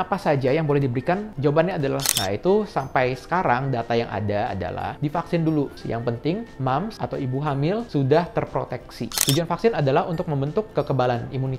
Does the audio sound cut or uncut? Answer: cut